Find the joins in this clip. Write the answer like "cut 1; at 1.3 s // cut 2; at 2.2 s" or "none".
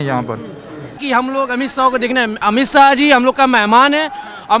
cut 1; at 1.0 s